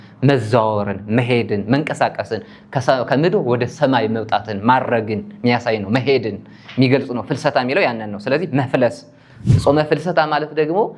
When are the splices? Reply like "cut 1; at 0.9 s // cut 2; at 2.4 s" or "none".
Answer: none